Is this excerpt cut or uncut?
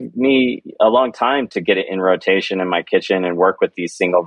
uncut